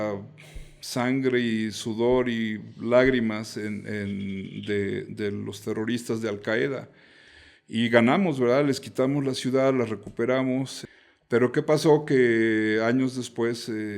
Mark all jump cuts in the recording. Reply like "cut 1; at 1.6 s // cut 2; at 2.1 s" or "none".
cut 1; at 10.8 s